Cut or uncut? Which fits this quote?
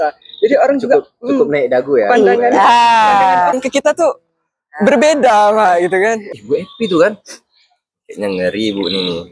cut